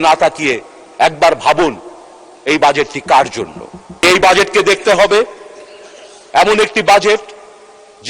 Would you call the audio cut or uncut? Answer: cut